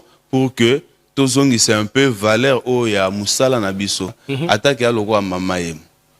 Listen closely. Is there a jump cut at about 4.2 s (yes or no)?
yes